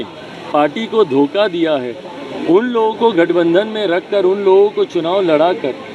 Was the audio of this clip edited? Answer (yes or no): no